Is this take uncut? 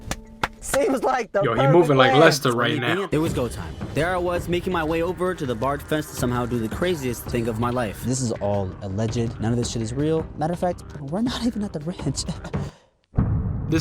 no; 1 cut; at 3.1 s

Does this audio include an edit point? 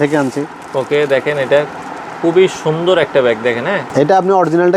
yes; 1 cut; at 3.9 s

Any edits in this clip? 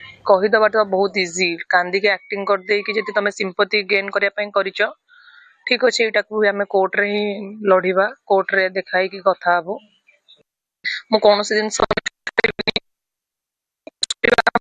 no; 0 cuts

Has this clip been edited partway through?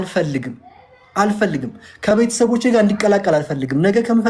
yes; 1 cut; at 2.1 s

